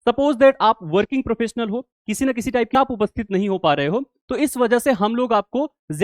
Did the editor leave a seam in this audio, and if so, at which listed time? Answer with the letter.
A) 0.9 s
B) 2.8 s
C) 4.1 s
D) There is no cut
B